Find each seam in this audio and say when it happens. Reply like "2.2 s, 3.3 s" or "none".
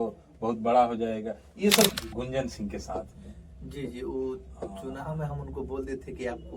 1.9 s

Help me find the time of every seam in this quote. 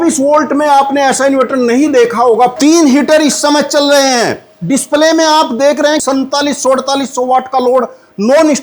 2.6 s, 6.0 s

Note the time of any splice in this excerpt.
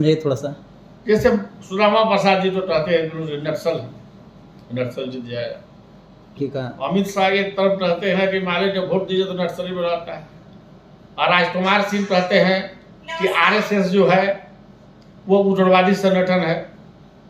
6.4 s

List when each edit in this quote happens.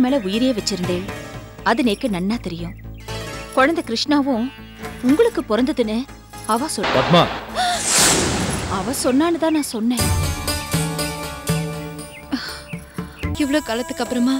13.4 s

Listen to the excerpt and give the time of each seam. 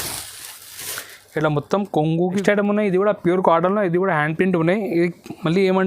2.3 s

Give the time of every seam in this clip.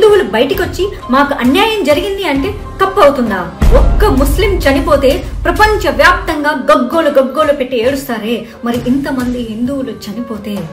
3.6 s

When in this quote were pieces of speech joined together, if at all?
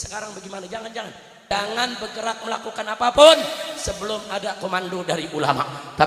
1.5 s

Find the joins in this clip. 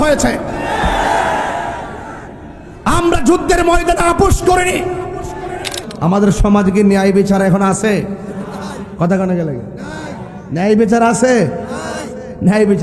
5.8 s

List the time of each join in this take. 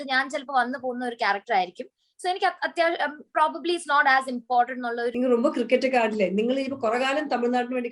5.1 s

